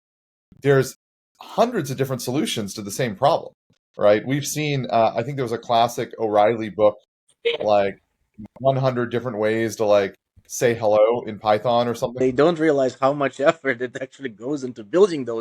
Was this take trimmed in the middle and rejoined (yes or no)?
yes